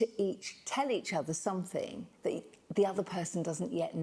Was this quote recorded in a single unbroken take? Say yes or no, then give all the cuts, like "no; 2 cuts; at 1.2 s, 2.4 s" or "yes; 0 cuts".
yes; 0 cuts